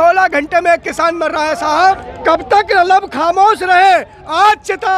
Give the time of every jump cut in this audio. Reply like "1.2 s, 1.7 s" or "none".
2.1 s